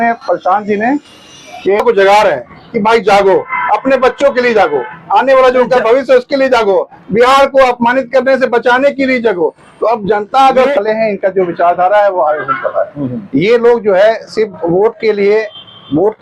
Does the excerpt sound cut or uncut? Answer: cut